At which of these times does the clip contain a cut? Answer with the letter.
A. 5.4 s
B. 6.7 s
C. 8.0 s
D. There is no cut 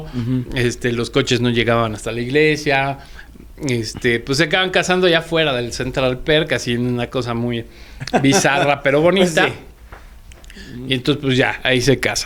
D